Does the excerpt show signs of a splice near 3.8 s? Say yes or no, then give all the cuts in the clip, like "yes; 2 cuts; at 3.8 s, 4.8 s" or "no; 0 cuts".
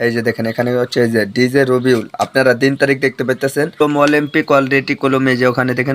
yes; 1 cut; at 3.8 s